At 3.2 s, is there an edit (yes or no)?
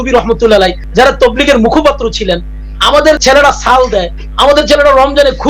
yes